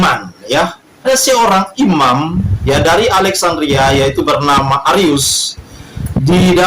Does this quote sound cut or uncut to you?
cut